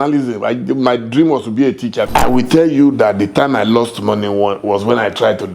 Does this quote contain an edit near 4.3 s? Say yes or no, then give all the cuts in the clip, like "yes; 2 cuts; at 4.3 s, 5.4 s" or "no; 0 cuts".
no; 1 cut; at 2.1 s